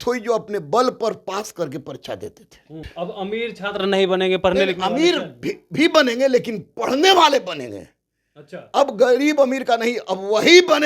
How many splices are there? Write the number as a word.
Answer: one